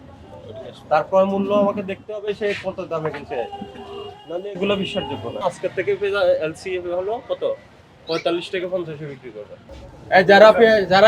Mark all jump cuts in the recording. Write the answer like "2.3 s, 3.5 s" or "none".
5.4 s, 9.9 s